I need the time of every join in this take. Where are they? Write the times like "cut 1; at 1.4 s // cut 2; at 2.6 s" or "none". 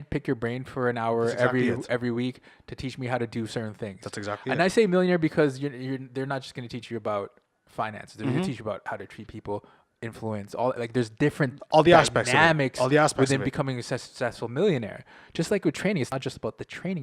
cut 1; at 16.1 s

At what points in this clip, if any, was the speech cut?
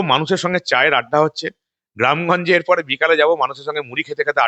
none

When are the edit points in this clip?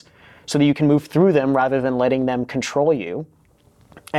none

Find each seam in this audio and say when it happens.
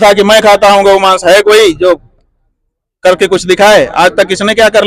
none

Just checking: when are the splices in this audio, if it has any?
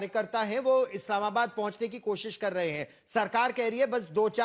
none

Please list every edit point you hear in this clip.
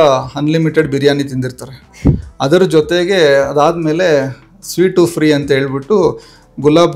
none

